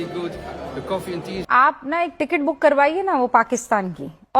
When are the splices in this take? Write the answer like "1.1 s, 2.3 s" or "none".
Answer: 1.4 s